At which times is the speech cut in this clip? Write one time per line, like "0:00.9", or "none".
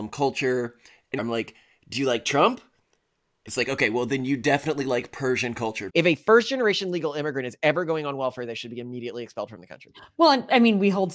0:01.2
0:05.8